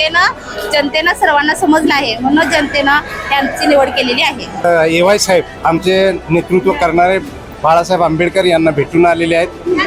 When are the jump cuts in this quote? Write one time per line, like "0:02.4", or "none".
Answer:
0:04.6
0:05.5